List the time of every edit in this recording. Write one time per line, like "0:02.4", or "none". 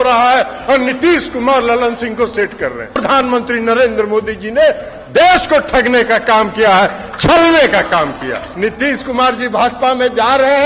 0:03.0
0:08.4